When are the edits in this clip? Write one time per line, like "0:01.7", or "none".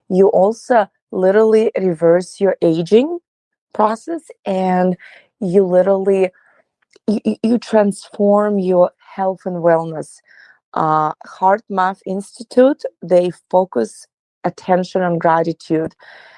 none

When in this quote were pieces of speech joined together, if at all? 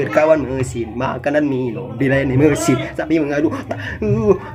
none

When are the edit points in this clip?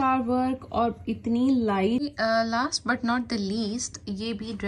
0:02.1

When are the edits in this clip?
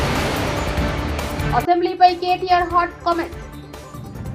0:01.4

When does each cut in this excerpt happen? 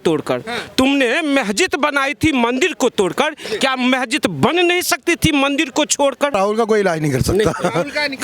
0:06.3

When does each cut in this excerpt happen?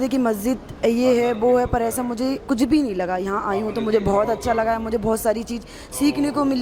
none

